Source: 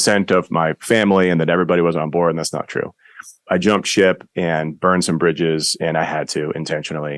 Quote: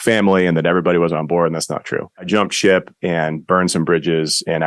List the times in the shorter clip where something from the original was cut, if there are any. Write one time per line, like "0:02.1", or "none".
0:02.3